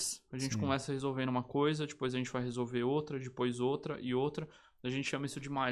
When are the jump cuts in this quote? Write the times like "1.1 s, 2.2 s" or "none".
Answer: none